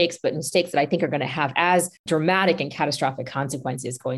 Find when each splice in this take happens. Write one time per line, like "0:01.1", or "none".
none